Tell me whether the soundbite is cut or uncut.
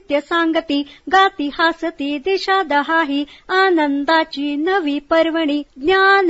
uncut